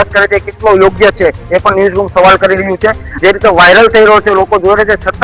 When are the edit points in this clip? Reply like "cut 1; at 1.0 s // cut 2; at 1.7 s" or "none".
cut 1; at 3.1 s